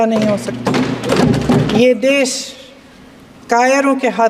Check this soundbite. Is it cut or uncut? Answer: cut